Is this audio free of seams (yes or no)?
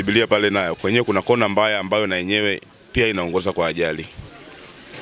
yes